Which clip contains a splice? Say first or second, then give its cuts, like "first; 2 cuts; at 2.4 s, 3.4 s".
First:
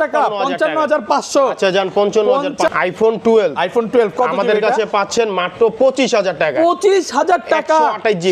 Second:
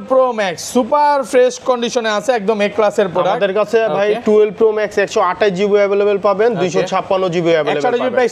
first; 1 cut; at 2.7 s